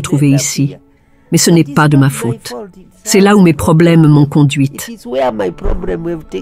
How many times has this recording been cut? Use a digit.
1